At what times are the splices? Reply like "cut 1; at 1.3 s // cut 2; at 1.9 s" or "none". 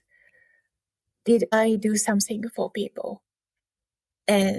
cut 1; at 1.5 s